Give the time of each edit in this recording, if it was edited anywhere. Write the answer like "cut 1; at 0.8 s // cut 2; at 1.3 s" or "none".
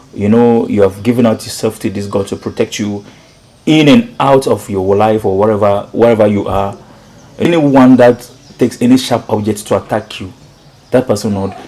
cut 1; at 7.5 s